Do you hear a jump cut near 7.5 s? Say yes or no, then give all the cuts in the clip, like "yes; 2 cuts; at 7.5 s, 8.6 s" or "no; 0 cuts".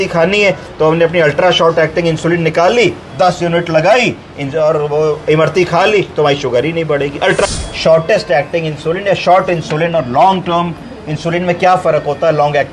yes; 1 cut; at 7.5 s